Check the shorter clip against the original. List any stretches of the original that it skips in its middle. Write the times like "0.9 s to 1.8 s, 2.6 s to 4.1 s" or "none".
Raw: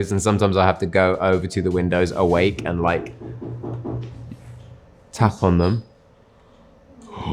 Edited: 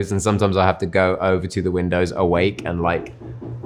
none